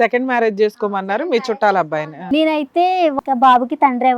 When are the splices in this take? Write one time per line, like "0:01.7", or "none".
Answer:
0:02.2
0:03.1